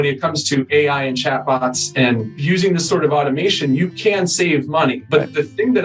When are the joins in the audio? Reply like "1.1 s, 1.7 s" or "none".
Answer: 2.3 s, 5.0 s